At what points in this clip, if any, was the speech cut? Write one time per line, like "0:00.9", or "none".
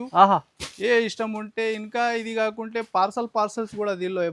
none